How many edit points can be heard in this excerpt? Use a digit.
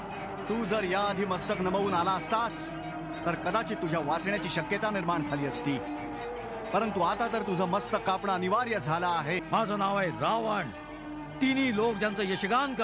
1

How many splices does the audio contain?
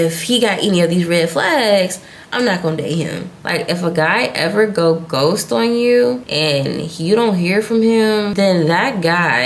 2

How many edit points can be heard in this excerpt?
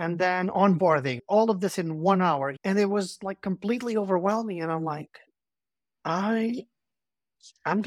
2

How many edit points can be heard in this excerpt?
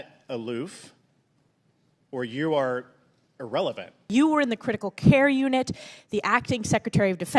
1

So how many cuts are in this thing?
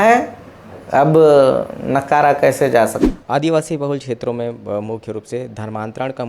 1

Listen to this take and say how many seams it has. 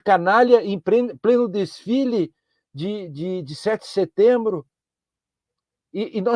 0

